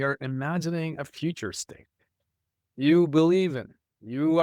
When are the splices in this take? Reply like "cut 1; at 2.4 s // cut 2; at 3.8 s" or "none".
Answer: none